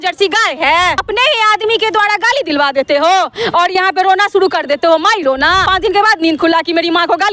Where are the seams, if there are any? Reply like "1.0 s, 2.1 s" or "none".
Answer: 1.0 s, 5.7 s